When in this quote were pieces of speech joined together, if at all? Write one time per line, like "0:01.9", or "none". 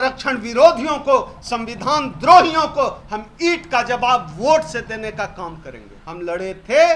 0:06.0